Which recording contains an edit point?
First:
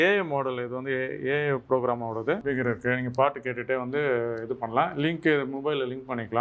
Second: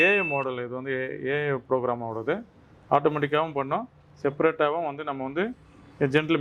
first; 1 cut; at 2.4 s

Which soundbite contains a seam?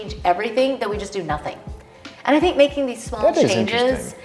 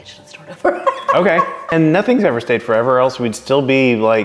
second; 1 cut; at 1.7 s

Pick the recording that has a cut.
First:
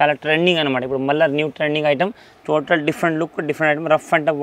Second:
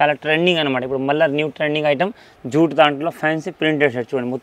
second; 1 cut; at 2.3 s

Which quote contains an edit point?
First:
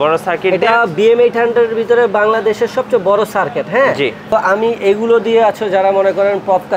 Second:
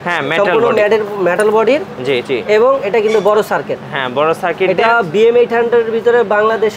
first; 1 cut; at 4.3 s

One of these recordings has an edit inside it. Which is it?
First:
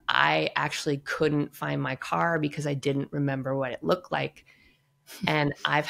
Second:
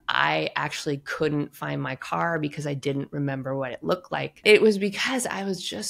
second; 1 cut; at 4.4 s

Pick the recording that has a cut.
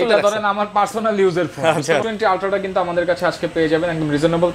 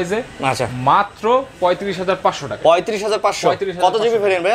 first; 1 cut; at 2.0 s

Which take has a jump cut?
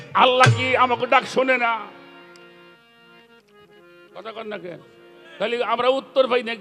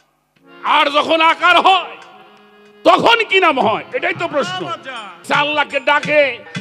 second; 1 cut; at 5.2 s

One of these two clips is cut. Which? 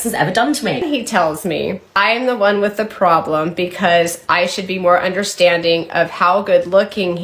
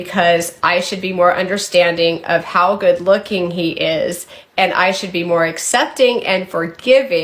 first; 2 cuts; at 0.8 s, 2.0 s

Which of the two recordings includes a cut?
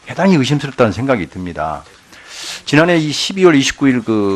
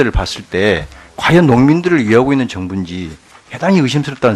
first; 1 cut; at 3.1 s

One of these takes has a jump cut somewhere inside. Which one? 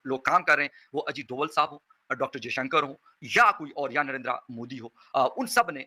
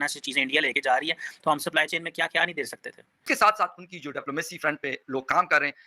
second; 1 cut; at 3.2 s

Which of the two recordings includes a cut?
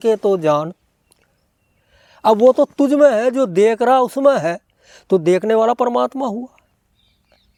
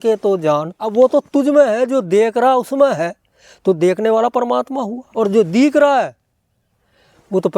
second; 2 cuts; at 0.9 s, 5.0 s

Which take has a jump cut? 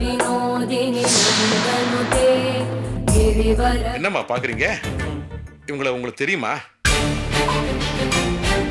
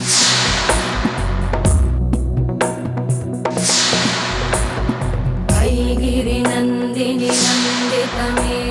first; 1 cut; at 3.9 s

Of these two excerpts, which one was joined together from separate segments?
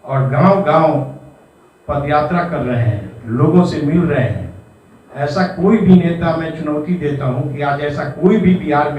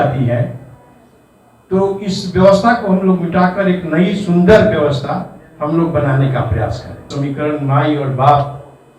second; 1 cut; at 7.1 s

